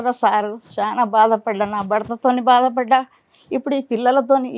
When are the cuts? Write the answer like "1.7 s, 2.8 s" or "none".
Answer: none